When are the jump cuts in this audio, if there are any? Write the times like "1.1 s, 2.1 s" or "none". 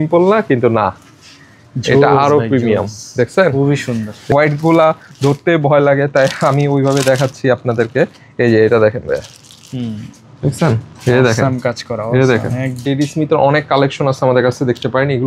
4.2 s, 12.8 s